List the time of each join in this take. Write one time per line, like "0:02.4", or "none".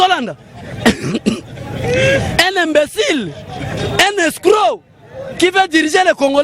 none